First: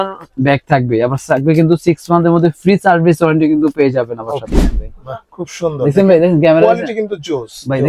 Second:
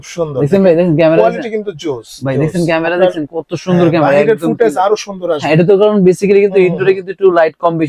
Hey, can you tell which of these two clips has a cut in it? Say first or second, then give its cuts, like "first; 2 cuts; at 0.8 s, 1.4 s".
first; 1 cut; at 4.5 s